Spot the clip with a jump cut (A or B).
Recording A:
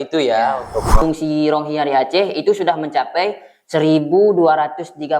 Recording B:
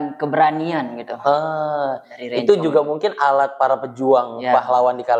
A